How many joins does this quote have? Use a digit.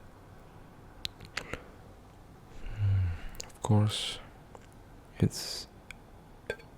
0